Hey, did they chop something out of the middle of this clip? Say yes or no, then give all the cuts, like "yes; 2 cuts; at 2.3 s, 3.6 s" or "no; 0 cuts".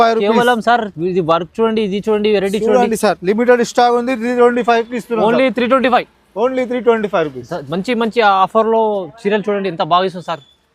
no; 0 cuts